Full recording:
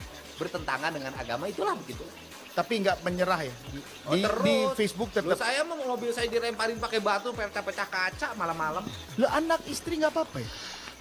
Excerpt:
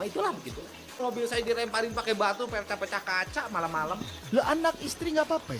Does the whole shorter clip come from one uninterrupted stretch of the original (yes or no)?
no